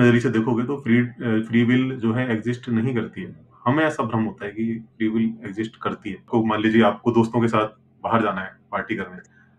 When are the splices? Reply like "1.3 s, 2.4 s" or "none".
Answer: 6.3 s